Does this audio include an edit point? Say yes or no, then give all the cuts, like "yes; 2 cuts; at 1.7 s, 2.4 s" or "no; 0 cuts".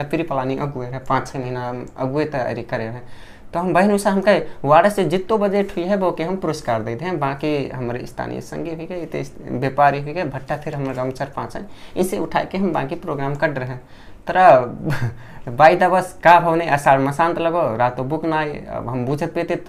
no; 0 cuts